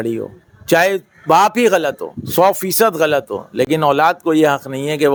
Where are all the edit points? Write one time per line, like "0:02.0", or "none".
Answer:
none